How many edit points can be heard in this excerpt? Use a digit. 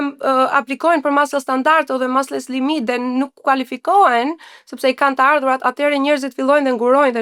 0